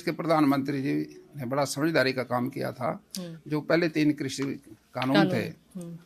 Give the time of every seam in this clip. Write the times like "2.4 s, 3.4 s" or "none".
none